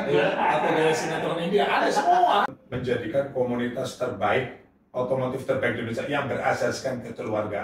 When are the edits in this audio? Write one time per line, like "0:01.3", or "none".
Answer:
0:02.6